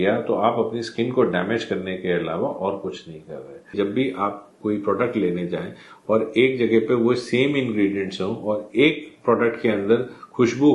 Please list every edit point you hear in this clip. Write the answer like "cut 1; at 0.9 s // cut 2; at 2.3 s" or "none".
cut 1; at 3.7 s